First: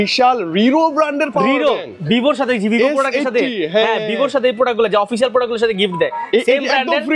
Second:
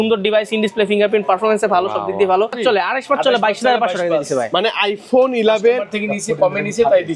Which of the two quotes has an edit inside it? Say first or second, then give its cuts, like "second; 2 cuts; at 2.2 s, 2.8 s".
second; 1 cut; at 2.6 s